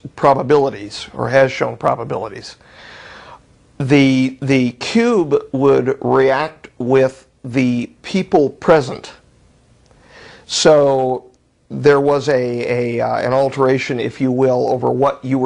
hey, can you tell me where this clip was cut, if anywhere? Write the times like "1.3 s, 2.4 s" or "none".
none